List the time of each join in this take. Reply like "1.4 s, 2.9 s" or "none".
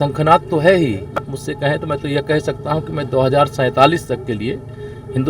1.3 s